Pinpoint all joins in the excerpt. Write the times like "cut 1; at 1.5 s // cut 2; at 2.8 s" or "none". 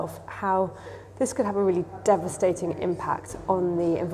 none